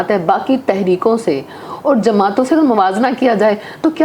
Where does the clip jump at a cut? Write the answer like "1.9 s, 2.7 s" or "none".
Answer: none